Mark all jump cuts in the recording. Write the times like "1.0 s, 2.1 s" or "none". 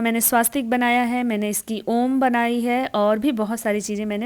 none